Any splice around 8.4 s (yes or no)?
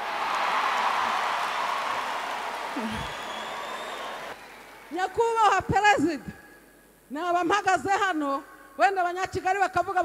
no